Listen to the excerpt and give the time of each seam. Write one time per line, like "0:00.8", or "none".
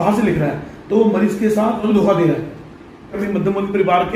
0:01.8
0:03.2

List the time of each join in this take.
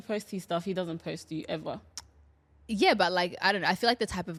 none

